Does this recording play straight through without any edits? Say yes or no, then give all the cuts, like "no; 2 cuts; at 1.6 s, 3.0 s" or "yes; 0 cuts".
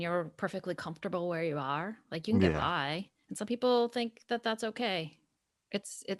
yes; 0 cuts